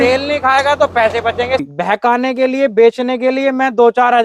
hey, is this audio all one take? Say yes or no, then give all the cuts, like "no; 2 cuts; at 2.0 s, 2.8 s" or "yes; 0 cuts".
no; 1 cut; at 1.7 s